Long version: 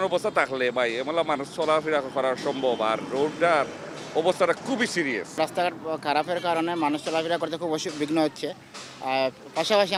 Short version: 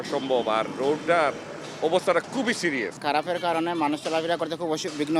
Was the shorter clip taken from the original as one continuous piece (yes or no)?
no